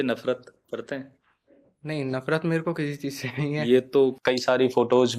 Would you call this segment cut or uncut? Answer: cut